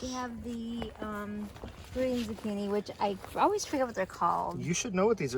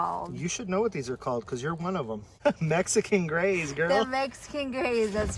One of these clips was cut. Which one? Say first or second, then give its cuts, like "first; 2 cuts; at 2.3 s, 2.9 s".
second; 1 cut; at 2.3 s